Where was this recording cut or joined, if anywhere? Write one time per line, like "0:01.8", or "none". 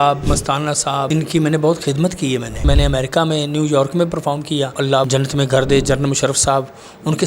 0:01.1
0:02.6
0:04.9